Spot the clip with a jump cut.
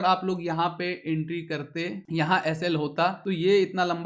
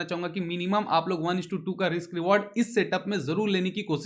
first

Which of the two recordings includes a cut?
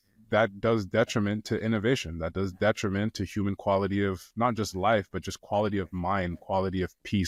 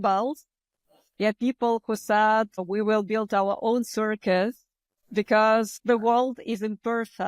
second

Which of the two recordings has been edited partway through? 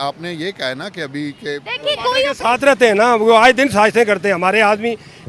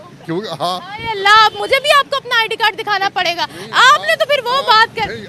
first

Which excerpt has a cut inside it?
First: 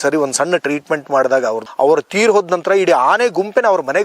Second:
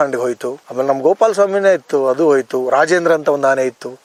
first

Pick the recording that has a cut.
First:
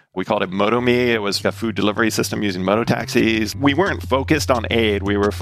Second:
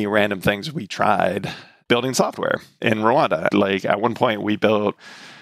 first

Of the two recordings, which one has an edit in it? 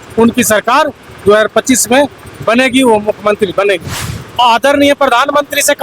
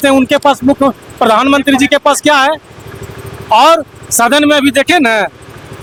first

